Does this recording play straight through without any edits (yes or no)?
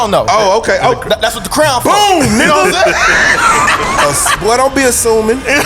yes